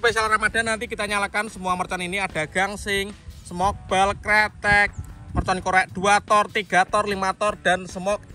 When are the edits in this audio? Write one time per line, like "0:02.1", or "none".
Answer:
none